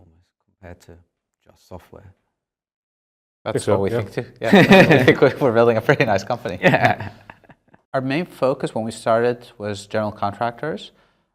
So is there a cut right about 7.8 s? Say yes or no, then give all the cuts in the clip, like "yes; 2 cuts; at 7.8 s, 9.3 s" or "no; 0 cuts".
yes; 1 cut; at 7.8 s